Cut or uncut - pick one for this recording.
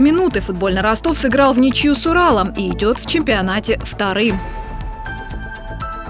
cut